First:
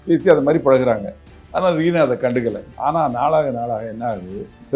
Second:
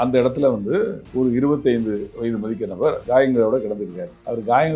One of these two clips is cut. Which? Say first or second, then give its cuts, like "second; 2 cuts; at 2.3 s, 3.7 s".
second; 1 cut; at 3.0 s